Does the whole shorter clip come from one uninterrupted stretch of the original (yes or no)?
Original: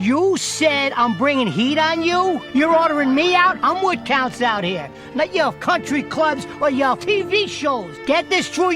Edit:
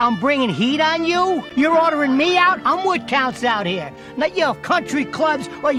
yes